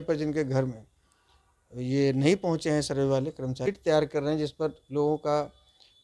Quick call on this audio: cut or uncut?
cut